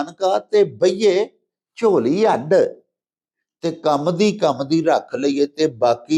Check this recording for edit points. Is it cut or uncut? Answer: uncut